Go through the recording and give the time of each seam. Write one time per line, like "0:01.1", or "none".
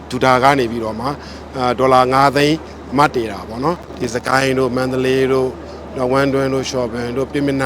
0:03.8

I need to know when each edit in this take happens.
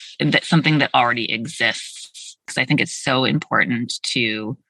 0:02.5

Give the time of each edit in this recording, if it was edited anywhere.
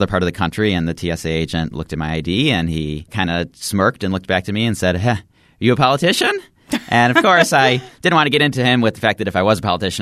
0:03.1

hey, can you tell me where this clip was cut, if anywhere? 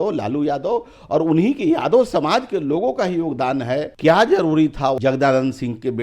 0:03.9
0:05.0

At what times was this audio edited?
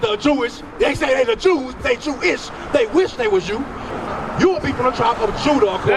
0:03.8

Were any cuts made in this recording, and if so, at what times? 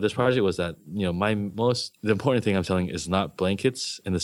none

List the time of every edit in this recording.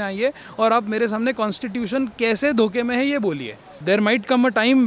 0:03.8

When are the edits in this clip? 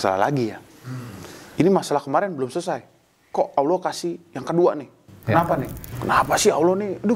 0:05.8

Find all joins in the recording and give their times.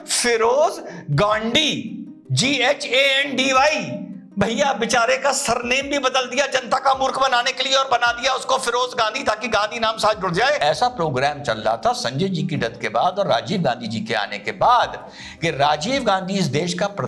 0:10.6

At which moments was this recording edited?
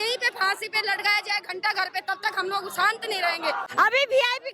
0:03.6

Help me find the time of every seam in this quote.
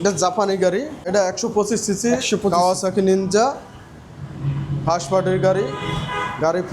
0:01.1

